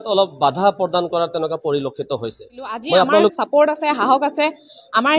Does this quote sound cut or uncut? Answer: cut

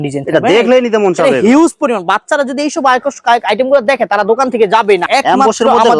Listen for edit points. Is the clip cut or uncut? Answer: cut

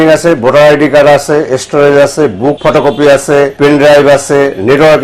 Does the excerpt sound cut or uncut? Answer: cut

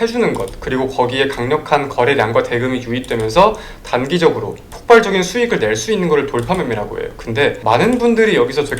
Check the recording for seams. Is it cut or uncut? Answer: cut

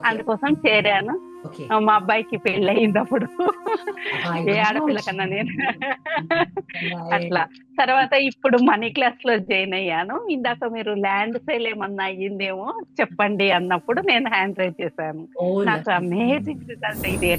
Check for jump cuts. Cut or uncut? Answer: uncut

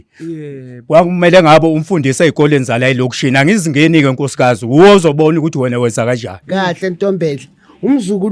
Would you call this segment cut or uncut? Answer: cut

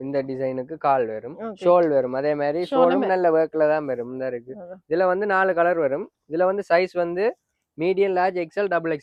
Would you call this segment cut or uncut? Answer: uncut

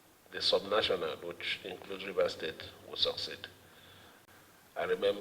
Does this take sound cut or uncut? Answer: cut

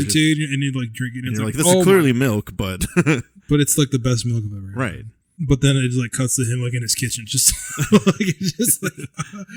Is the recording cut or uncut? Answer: uncut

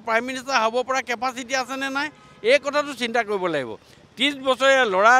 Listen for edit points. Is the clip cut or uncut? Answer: uncut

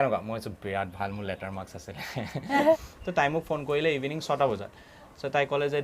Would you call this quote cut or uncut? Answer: cut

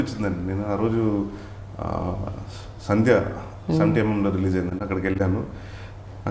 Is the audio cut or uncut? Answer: uncut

